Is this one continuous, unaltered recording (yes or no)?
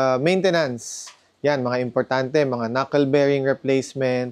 yes